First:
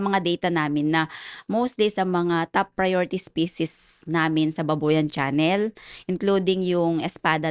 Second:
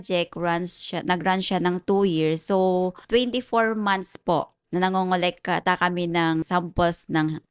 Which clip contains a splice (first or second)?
second